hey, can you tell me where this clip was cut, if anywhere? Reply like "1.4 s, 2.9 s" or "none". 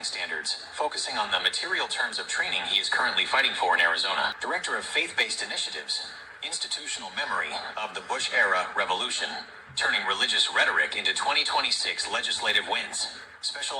4.4 s